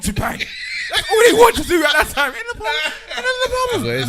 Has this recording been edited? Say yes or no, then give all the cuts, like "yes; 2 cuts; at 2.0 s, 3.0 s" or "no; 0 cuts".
no; 0 cuts